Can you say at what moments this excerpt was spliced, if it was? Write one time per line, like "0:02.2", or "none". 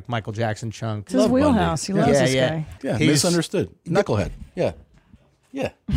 0:01.0
0:02.8